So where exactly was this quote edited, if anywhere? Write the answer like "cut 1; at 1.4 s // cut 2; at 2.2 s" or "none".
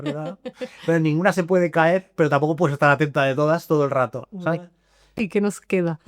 cut 1; at 5.2 s